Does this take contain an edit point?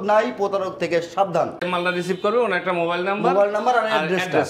yes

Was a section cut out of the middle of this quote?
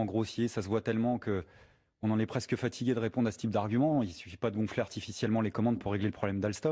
yes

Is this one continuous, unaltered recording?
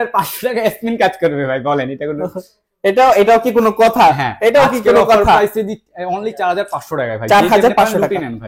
yes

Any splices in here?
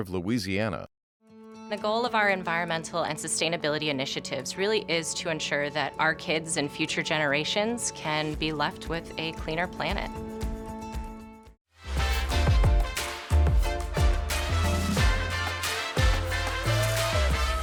no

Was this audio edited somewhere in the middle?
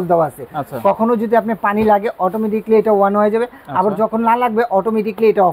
no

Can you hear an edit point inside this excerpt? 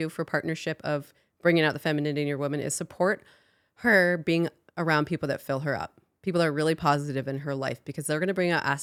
no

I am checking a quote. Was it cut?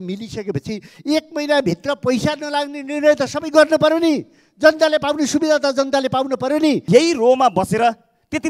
yes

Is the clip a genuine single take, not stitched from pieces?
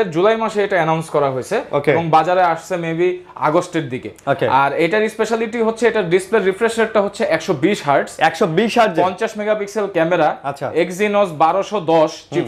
yes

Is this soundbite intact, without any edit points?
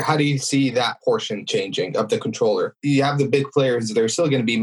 no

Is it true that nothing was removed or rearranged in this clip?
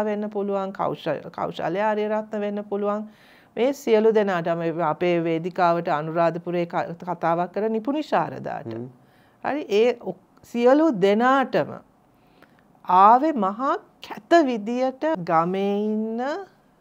no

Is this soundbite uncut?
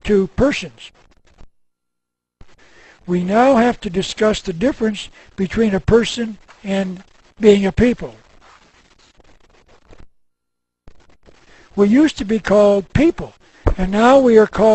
no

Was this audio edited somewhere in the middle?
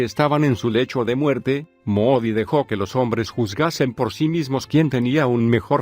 yes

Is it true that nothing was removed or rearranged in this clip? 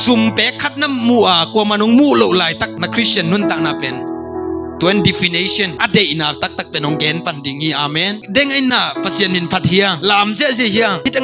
yes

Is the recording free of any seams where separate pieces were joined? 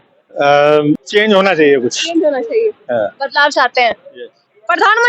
no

